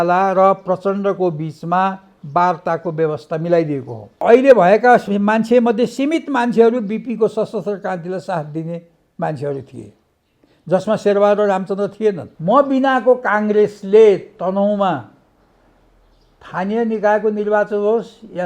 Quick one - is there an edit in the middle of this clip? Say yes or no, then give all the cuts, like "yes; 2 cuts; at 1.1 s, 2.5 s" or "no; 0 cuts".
yes; 2 cuts; at 4.2 s, 12.3 s